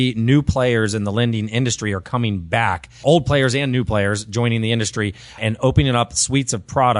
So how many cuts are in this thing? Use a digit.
2